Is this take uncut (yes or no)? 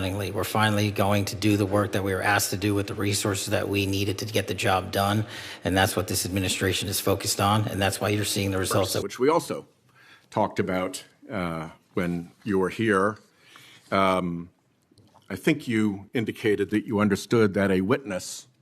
no